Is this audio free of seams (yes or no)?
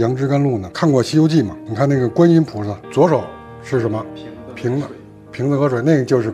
no